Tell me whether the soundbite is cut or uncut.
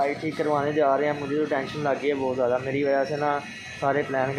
uncut